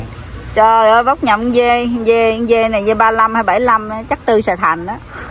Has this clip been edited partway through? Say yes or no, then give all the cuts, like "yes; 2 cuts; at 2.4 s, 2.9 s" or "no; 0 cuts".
no; 0 cuts